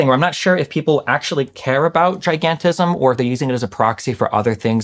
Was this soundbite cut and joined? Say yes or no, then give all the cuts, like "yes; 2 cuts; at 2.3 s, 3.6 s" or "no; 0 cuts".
yes; 1 cut; at 3.0 s